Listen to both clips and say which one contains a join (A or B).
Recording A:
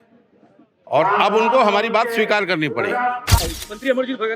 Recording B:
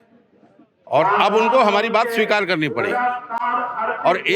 A